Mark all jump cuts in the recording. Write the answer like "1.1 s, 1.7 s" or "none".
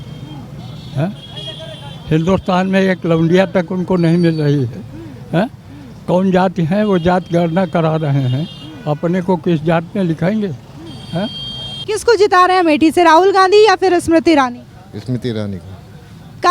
11.7 s